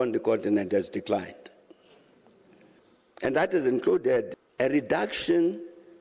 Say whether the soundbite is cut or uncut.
cut